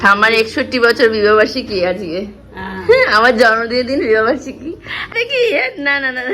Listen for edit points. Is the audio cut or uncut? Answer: cut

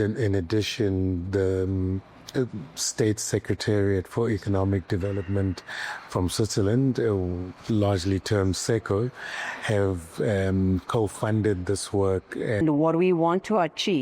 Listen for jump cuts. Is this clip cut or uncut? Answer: cut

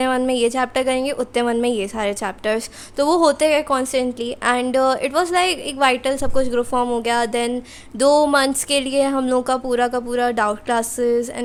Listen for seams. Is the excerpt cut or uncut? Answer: uncut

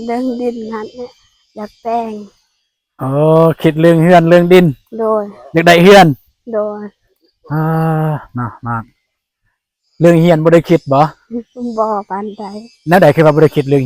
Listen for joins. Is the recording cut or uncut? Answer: uncut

